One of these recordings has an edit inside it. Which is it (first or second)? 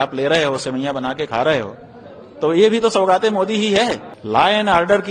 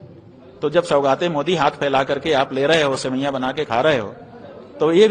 first